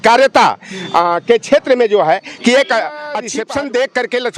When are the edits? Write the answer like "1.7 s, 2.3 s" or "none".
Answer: 3.0 s